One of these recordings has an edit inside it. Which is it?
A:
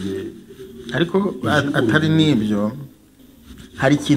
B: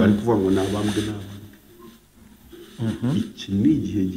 A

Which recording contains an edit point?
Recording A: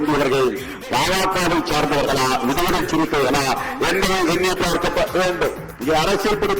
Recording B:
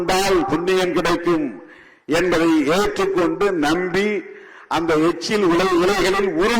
A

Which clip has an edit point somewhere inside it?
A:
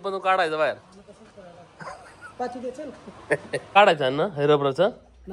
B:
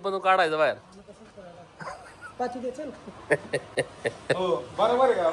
A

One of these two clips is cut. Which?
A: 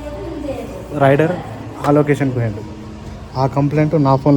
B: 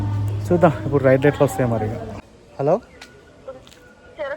B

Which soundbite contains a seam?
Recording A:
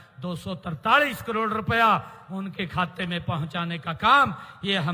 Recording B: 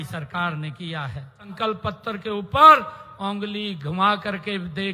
B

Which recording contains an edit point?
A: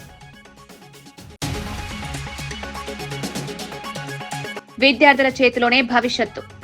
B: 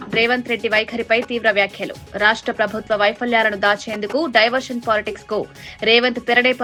A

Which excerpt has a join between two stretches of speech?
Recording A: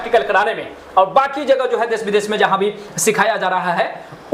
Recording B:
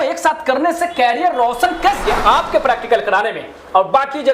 B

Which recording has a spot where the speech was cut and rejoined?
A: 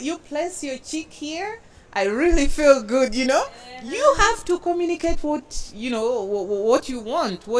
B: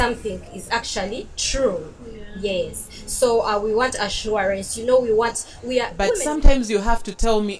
B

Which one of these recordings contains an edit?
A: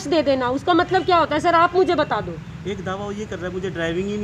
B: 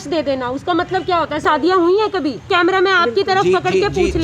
B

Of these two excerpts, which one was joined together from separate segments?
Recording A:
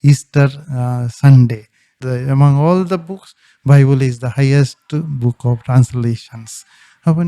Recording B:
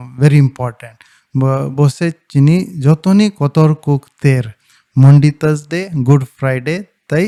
A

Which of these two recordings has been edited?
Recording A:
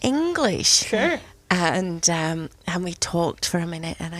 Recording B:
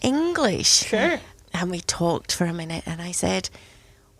B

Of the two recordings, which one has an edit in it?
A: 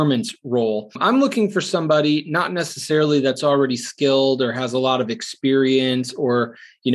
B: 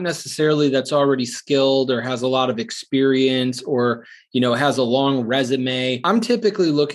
B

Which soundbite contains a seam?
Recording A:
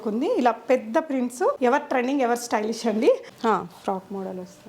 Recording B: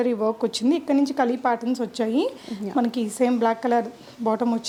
A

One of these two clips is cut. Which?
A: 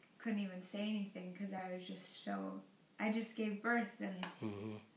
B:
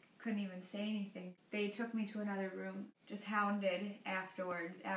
B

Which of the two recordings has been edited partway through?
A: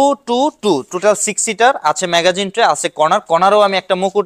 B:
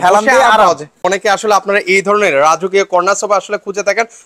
B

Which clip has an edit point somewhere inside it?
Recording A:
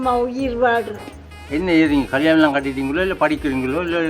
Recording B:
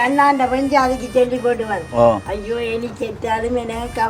A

